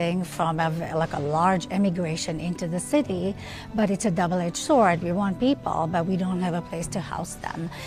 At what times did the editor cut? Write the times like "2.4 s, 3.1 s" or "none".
none